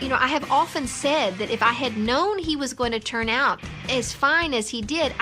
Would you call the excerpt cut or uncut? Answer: uncut